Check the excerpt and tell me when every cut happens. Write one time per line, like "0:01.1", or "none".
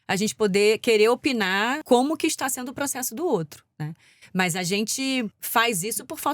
0:05.4